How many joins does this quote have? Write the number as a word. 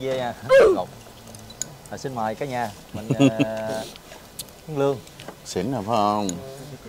zero